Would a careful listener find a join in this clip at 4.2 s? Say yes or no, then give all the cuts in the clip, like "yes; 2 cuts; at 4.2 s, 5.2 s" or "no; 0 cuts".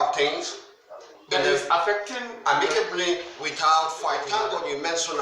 yes; 1 cut; at 4.2 s